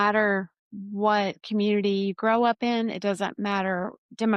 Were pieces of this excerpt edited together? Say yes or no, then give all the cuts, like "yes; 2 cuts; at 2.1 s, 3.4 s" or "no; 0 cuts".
no; 0 cuts